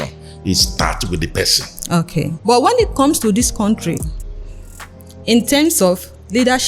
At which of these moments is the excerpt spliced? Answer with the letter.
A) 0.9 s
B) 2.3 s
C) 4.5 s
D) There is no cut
B